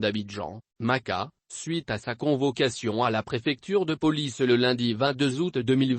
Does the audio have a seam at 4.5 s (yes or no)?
no